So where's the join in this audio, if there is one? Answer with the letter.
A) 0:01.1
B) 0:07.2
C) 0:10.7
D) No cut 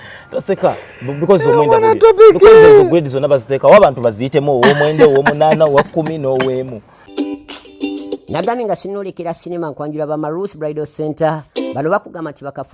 B